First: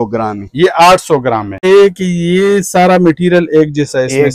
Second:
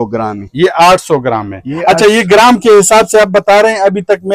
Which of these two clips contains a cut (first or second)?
first